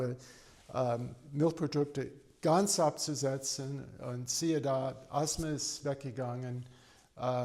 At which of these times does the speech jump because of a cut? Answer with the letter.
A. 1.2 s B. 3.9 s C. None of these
C